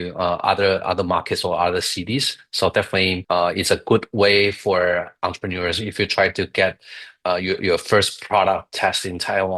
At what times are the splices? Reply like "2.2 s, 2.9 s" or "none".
3.2 s